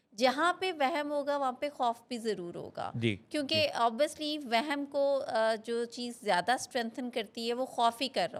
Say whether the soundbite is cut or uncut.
uncut